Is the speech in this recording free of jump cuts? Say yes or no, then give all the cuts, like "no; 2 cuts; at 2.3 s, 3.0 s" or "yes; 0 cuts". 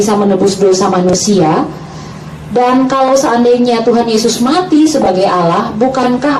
yes; 0 cuts